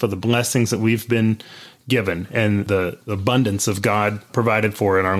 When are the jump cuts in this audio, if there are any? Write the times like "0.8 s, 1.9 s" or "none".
2.7 s, 4.3 s